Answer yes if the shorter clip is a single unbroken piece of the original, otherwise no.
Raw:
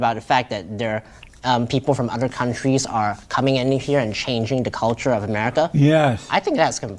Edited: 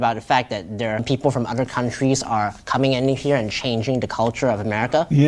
no